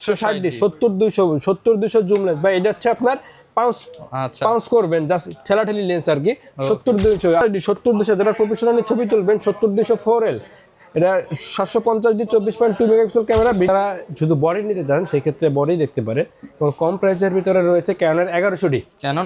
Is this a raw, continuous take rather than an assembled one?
no; 2 cuts; at 7.4 s, 13.7 s

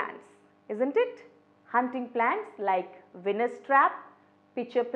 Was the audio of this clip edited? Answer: no; 0 cuts

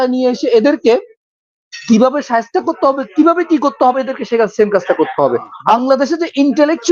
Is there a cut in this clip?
yes; 1 cut; at 5.5 s

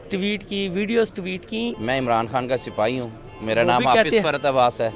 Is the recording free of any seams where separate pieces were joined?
no; 1 cut; at 1.8 s

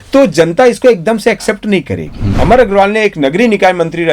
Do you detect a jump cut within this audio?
yes; 1 cut; at 2.3 s

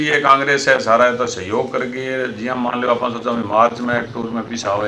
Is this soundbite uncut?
yes; 0 cuts

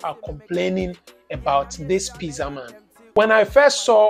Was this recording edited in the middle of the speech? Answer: yes; 1 cut; at 3.1 s

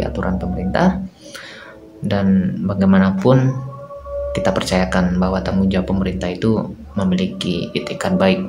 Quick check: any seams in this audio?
no; 0 cuts

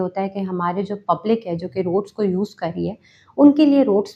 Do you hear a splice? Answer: no; 0 cuts

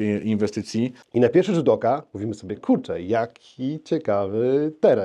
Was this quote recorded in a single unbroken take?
no; 1 cut; at 1.0 s

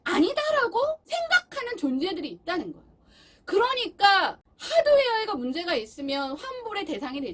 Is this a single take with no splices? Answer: no; 2 cuts; at 1.0 s, 4.4 s

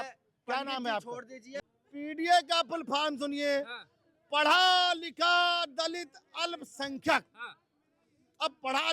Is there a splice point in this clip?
yes; 1 cut; at 1.4 s

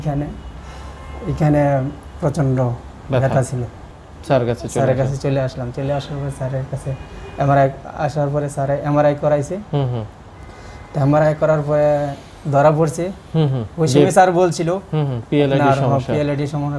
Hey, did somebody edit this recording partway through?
yes; 1 cut; at 3.9 s

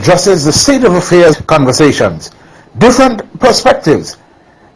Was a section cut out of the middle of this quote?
yes; 1 cut; at 1.4 s

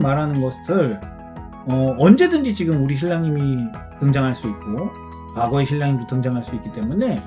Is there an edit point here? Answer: no; 0 cuts

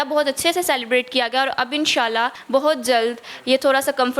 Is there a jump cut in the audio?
yes; 1 cut; at 2.4 s

